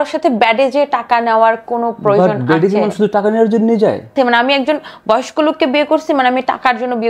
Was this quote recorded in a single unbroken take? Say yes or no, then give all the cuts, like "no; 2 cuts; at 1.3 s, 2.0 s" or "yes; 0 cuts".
no; 1 cut; at 4.1 s